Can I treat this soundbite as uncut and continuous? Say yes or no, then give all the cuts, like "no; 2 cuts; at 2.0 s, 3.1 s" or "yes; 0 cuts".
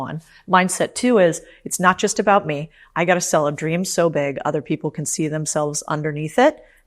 yes; 0 cuts